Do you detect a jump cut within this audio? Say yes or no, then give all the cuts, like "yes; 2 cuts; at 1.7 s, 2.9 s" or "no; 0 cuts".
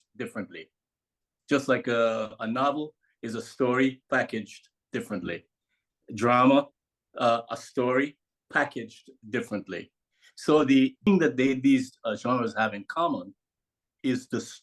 yes; 1 cut; at 11.1 s